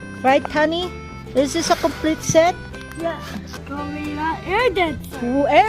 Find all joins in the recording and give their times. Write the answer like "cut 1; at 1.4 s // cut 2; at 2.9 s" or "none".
cut 1; at 3.5 s